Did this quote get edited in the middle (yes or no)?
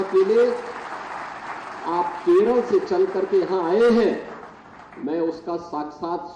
no